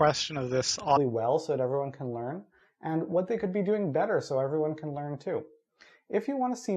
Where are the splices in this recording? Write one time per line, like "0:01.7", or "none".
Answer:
none